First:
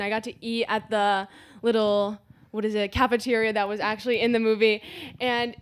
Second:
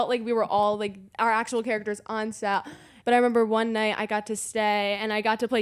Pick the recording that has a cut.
second; 1 cut; at 2.9 s

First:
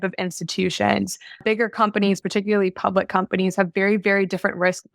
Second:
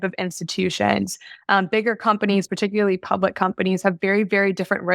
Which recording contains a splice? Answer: first; 1 cut; at 1.4 s

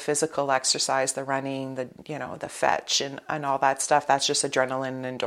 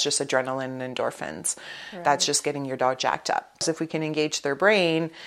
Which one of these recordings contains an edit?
second; 1 cut; at 3.6 s

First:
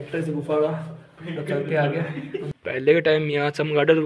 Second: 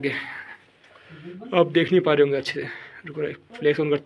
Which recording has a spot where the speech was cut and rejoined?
first; 1 cut; at 2.5 s

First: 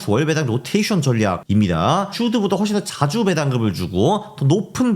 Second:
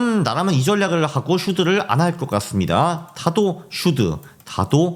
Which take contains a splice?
first; 1 cut; at 1.4 s

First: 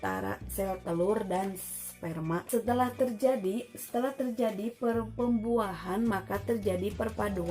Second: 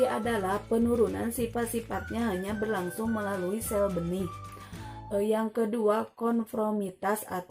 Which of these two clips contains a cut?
first; 1 cut; at 2.5 s

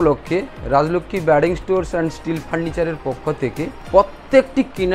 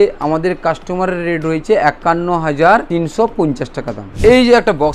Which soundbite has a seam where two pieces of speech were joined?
second; 2 cuts; at 2.9 s, 4.1 s

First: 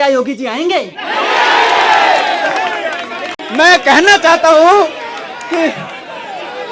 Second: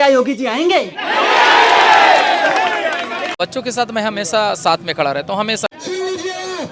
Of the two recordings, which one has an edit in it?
second; 2 cuts; at 3.4 s, 5.7 s

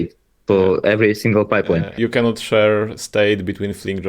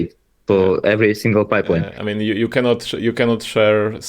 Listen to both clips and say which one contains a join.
first; 1 cut; at 1.9 s

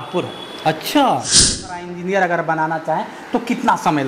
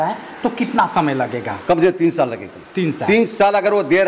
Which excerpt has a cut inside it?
first; 1 cut; at 1.7 s

